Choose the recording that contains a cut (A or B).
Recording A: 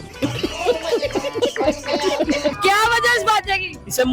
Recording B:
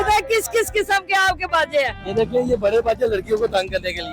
A